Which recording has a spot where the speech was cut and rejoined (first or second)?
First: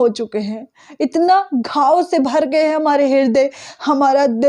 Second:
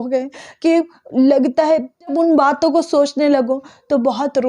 second